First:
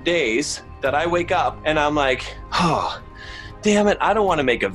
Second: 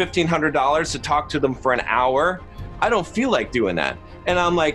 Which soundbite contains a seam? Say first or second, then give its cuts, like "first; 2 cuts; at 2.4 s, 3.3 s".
first; 1 cut; at 1.6 s